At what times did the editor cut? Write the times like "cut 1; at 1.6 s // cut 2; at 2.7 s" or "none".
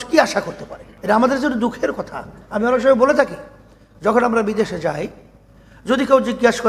cut 1; at 0.9 s

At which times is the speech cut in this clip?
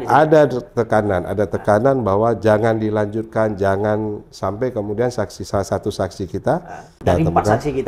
cut 1; at 7.0 s

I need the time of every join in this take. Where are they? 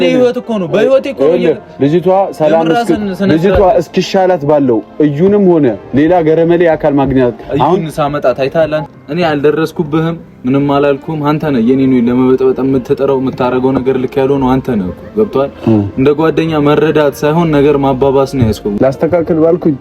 cut 1; at 8.9 s // cut 2; at 18.7 s

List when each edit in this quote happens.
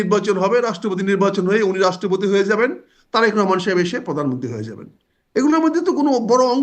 none

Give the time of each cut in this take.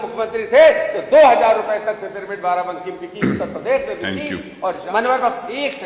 cut 1; at 4.8 s

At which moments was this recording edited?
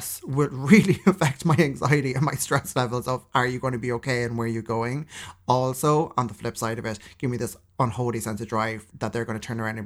cut 1; at 8.9 s

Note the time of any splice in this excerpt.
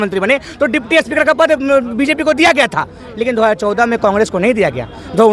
none

